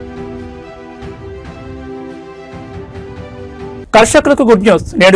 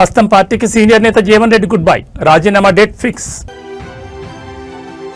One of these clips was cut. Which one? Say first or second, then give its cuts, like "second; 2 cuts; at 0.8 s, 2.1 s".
first; 1 cut; at 3.8 s